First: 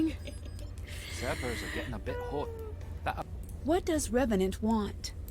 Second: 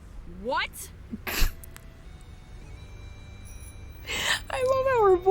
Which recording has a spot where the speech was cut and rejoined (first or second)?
first